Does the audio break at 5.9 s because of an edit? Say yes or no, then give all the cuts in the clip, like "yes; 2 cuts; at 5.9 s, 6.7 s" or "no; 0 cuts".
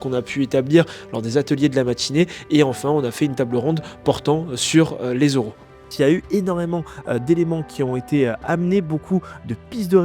yes; 1 cut; at 5.9 s